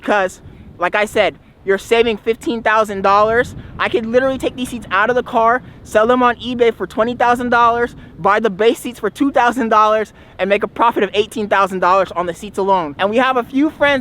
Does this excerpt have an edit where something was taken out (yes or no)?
yes